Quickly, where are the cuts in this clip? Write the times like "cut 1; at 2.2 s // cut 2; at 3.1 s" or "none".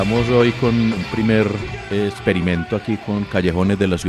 cut 1; at 1.0 s // cut 2; at 1.7 s